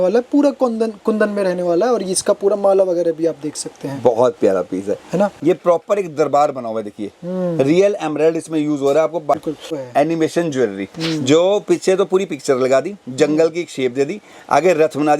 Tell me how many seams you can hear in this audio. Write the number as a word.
two